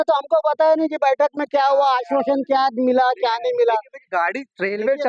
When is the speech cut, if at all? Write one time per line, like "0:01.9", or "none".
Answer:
none